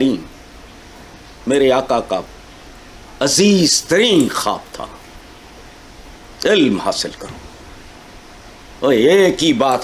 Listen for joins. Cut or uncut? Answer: uncut